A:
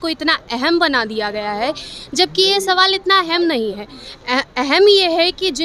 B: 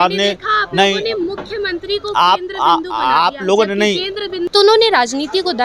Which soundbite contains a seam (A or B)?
B